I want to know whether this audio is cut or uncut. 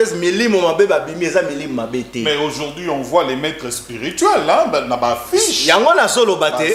uncut